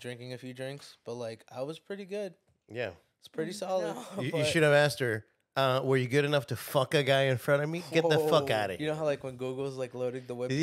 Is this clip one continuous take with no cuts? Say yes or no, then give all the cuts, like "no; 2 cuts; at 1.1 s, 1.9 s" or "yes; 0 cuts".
no; 2 cuts; at 4.1 s, 8.8 s